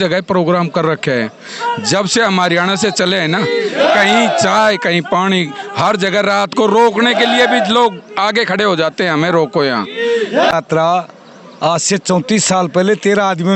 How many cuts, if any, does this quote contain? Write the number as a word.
one